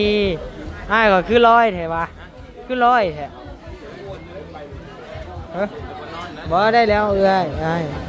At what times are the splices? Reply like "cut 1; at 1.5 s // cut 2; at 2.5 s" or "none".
none